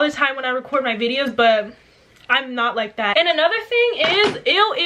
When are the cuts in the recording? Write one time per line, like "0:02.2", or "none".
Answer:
0:03.1